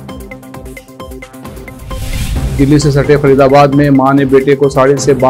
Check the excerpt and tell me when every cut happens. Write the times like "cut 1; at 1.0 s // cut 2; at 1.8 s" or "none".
cut 1; at 1.7 s